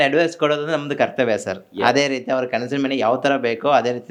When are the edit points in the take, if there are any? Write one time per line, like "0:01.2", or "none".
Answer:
none